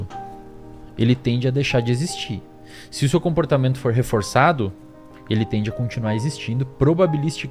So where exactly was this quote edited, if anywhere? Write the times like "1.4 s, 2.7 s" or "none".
none